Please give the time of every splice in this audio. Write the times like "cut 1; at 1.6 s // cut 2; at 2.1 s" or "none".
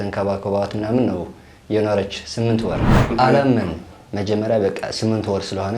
cut 1; at 2.9 s